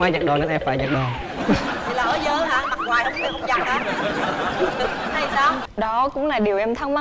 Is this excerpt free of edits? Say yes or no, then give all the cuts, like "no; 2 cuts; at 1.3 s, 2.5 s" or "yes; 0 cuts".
no; 1 cut; at 5.6 s